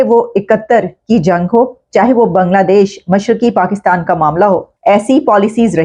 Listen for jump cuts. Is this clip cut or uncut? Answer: cut